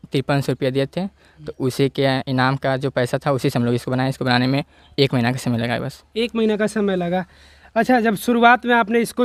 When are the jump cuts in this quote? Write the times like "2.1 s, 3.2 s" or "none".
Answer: none